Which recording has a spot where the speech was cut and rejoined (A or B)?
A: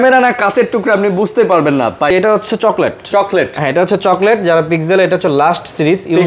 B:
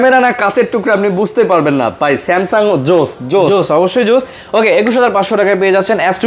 A